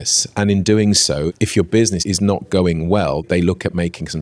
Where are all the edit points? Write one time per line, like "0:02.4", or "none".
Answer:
0:01.3
0:02.0
0:03.2

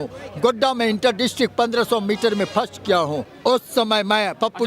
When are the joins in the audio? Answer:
0:03.3

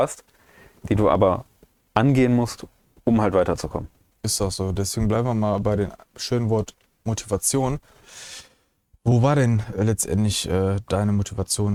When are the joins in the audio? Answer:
none

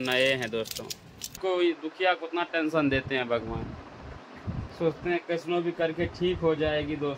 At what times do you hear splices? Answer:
0:01.3
0:04.7

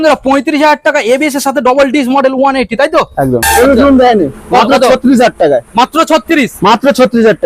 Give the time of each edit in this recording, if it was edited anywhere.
0:03.4

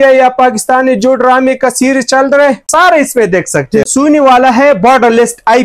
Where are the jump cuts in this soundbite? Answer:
0:02.6
0:03.9

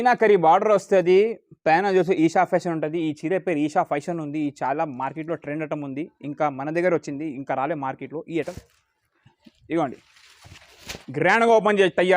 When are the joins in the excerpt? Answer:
0:08.4

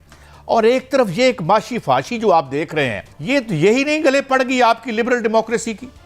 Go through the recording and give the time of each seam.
0:03.1

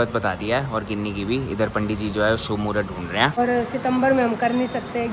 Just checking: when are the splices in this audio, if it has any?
0:03.4

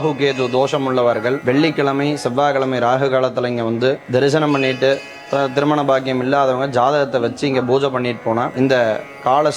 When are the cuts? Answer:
0:01.4
0:04.0
0:08.5

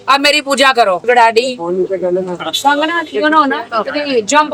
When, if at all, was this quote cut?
0:01.0

